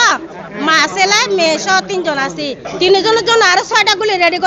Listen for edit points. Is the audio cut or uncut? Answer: cut